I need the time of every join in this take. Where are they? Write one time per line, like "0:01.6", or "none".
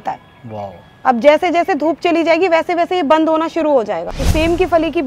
0:04.1